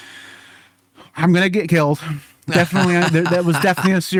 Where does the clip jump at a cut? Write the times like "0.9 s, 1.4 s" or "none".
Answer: none